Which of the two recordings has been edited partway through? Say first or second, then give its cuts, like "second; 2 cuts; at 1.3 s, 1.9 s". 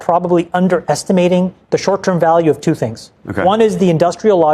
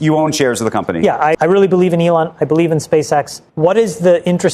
second; 2 cuts; at 1.4 s, 3.4 s